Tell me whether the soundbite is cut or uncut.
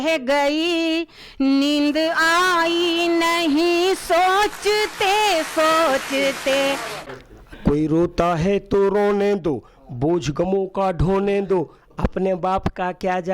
cut